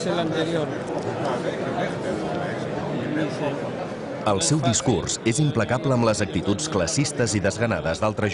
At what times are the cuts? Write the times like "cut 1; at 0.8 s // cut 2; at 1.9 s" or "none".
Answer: none